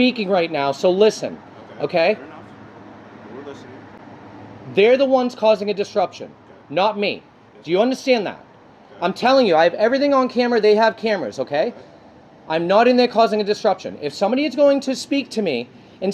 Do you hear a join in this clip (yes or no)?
no